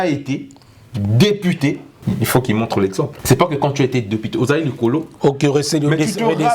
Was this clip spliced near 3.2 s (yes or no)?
yes